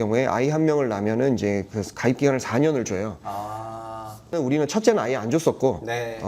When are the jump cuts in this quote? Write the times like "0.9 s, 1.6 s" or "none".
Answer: 4.3 s

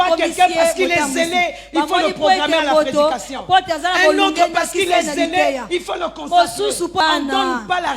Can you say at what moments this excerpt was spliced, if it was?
7.0 s

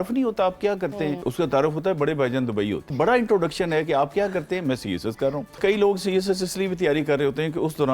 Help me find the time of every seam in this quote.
1.2 s, 2.9 s, 5.6 s

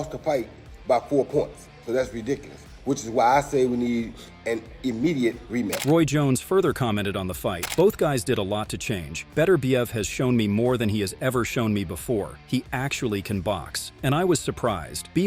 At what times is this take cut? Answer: none

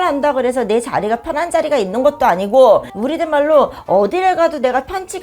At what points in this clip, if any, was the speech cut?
2.9 s

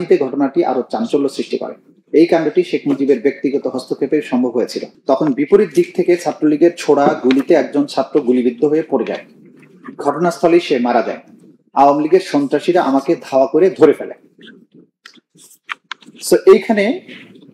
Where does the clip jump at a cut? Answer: 4.9 s

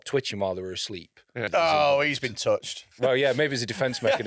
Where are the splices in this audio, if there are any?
1.4 s, 2.9 s

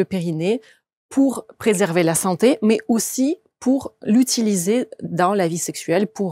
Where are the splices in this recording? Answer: none

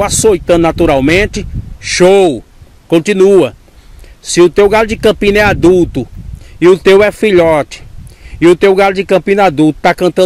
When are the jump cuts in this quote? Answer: none

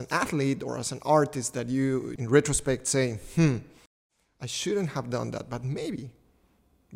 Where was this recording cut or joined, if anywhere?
2.1 s

